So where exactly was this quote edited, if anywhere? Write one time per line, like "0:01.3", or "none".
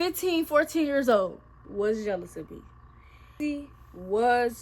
0:01.6
0:03.3